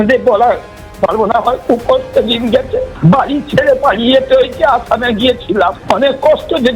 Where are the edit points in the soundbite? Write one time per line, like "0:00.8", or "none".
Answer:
0:02.9
0:05.8